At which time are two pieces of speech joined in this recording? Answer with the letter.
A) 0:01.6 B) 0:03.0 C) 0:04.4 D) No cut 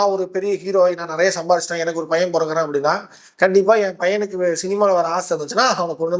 D